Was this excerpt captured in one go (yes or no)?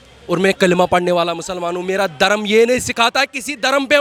yes